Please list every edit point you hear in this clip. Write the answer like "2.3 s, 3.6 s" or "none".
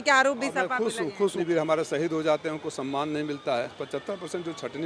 1.4 s, 3.8 s

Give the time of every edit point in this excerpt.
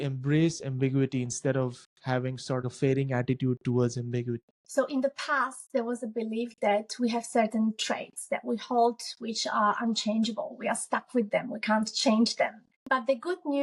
4.5 s, 12.7 s

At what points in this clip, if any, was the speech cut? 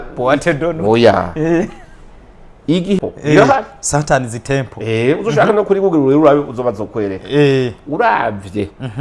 3.0 s

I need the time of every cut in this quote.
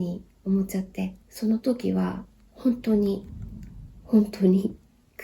1.2 s

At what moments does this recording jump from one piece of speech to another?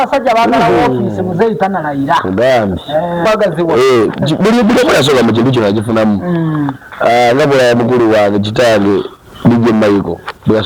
3.3 s

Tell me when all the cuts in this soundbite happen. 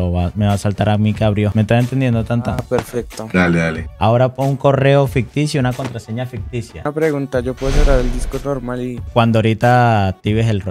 none

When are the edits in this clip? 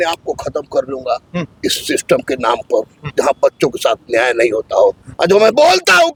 none

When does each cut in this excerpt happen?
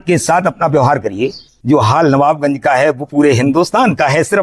1.5 s

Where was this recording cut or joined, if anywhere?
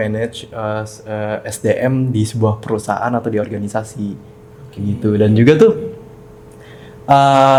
none

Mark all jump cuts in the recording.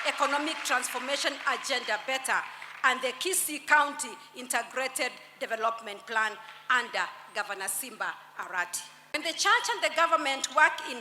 9.2 s

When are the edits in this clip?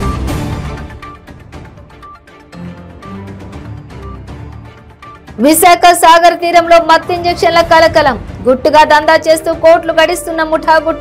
2.6 s

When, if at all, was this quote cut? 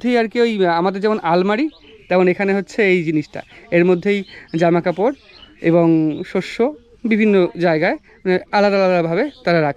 none

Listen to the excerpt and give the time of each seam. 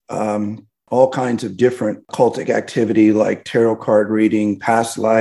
2.0 s

